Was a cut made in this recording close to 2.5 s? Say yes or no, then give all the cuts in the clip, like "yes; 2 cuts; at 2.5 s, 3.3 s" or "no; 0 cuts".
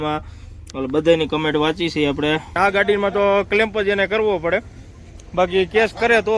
yes; 1 cut; at 2.5 s